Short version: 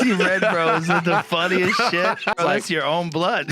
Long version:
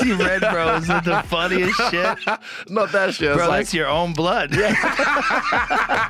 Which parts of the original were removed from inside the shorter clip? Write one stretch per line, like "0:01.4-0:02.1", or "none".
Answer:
0:02.4-0:03.4